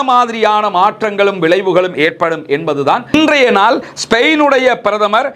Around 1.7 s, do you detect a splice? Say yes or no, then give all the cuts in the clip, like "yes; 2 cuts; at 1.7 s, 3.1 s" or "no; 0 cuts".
no; 1 cut; at 3.1 s